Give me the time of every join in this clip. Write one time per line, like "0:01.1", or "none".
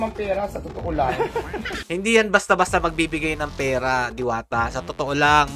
0:01.8